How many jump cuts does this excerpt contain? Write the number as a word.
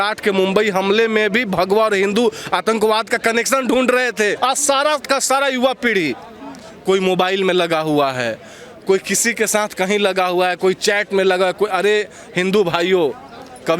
one